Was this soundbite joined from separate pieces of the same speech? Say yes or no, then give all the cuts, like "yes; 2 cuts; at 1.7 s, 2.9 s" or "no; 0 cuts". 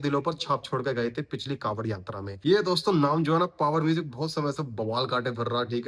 yes; 1 cut; at 2.3 s